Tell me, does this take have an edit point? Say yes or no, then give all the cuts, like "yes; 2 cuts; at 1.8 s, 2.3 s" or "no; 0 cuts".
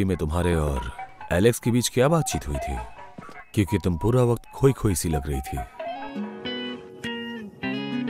yes; 2 cuts; at 3.4 s, 6.1 s